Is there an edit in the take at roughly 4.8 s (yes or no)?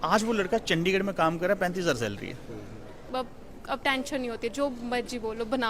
no